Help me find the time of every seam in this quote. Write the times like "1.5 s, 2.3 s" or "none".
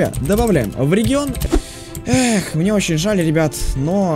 1.4 s